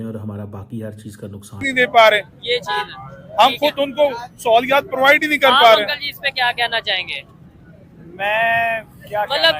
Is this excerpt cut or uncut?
cut